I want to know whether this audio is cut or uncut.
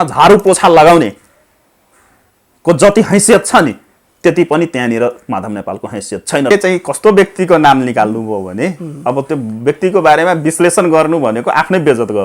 cut